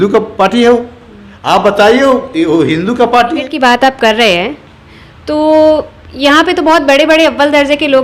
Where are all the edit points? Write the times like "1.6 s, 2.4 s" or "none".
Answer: 3.5 s